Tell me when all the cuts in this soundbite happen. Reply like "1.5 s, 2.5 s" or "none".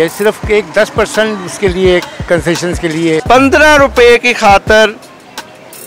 3.2 s